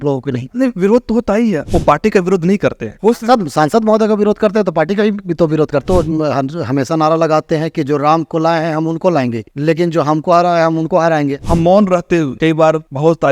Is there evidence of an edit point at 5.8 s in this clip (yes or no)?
yes